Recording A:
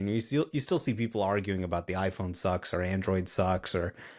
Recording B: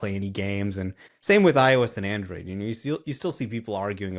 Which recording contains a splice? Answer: B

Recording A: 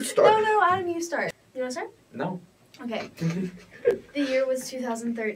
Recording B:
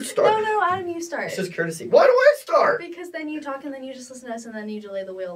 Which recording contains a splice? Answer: A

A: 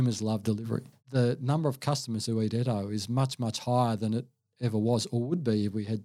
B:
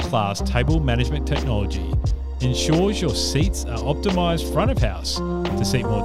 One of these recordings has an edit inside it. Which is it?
A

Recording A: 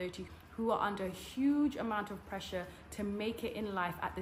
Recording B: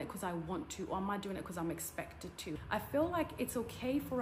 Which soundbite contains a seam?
B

